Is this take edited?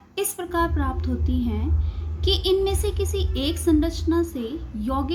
yes; 1 cut; at 3.7 s

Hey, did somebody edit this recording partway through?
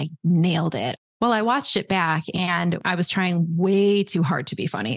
yes; 2 cuts; at 0.9 s, 2.8 s

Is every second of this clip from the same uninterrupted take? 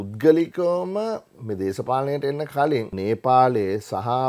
no; 1 cut; at 2.9 s

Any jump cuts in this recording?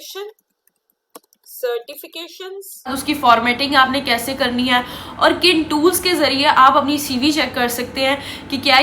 yes; 1 cut; at 2.9 s

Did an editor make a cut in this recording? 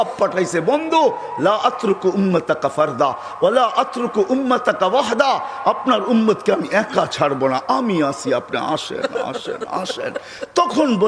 no; 0 cuts

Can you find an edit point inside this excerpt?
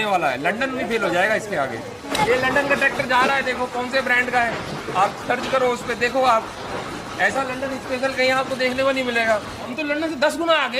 yes; 2 cuts; at 2.1 s, 9.7 s

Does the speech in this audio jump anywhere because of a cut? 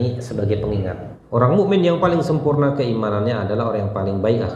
yes; 1 cut; at 1.1 s

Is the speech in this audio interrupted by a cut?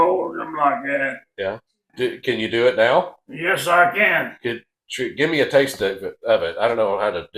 yes; 1 cut; at 1.8 s

